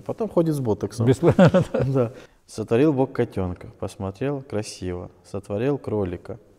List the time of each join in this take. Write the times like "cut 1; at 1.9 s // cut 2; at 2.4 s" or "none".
cut 1; at 2.2 s